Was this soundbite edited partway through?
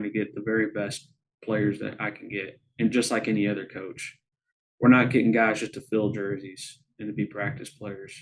no; 0 cuts

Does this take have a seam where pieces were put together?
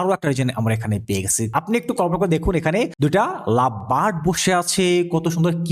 yes; 2 cuts; at 1.5 s, 2.9 s

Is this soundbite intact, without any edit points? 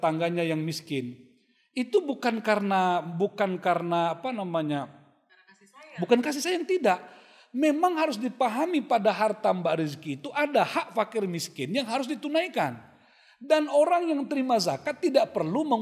yes; 0 cuts

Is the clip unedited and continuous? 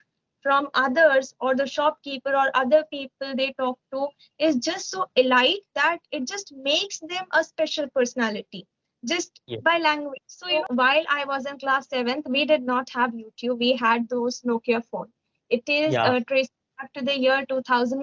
no; 1 cut; at 10.5 s

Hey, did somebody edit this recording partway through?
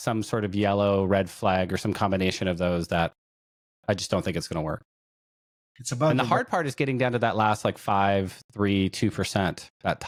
no; 0 cuts

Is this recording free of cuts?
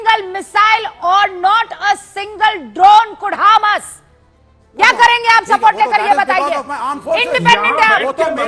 no; 1 cut; at 6.4 s

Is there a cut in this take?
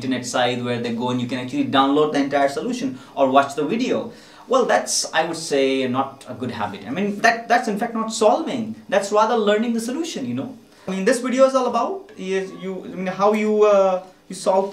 yes; 1 cut; at 10.9 s

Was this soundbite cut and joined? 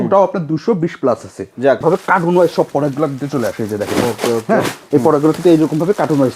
yes; 1 cut; at 1.8 s

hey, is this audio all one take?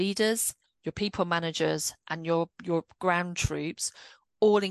yes; 0 cuts

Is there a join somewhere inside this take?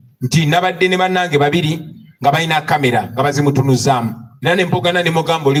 no; 0 cuts

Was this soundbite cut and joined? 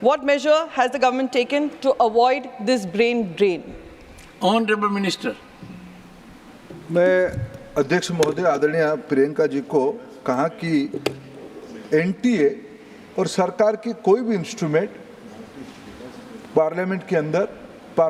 no; 0 cuts

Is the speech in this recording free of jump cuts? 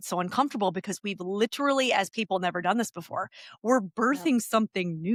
yes; 0 cuts

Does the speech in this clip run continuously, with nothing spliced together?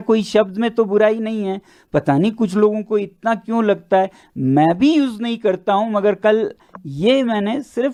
yes; 0 cuts

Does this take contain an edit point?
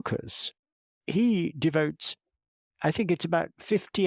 yes; 1 cut; at 0.9 s

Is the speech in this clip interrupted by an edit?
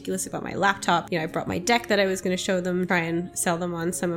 yes; 2 cuts; at 1.0 s, 2.9 s

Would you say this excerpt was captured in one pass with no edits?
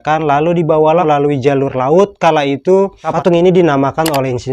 no; 2 cuts; at 1.0 s, 3.1 s

